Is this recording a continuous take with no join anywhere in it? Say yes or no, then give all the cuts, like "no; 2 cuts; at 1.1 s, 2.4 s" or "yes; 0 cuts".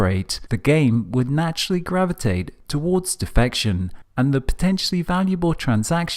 no; 1 cut; at 3.3 s